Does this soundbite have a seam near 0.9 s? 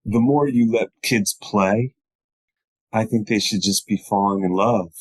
yes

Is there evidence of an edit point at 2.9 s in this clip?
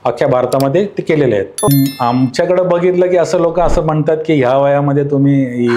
no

